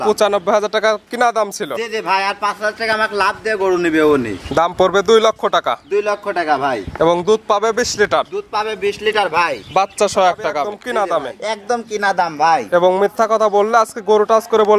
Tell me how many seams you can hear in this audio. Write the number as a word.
one